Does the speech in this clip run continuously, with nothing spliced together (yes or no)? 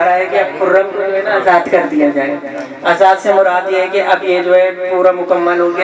yes